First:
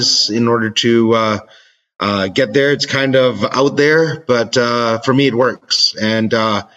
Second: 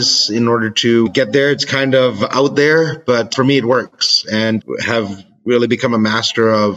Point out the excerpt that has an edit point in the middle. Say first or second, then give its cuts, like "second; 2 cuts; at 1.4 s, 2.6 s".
second; 3 cuts; at 1.1 s, 3.3 s, 4.6 s